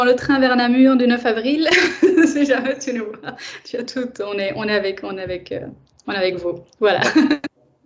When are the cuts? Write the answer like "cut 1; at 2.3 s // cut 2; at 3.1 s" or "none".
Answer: none